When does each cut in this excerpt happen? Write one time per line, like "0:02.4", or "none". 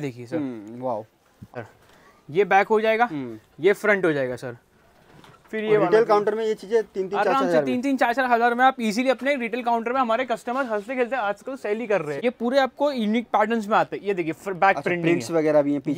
0:01.5
0:12.1